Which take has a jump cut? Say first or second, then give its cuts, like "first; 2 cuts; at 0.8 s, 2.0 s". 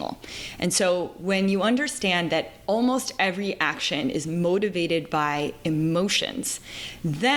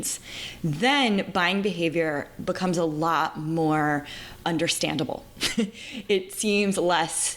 second; 1 cut; at 4.4 s